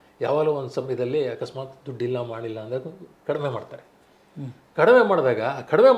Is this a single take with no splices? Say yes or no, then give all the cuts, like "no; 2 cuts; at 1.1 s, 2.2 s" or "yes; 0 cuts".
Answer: yes; 0 cuts